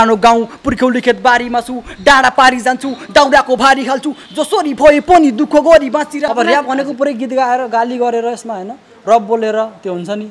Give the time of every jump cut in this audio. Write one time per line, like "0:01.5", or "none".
0:06.3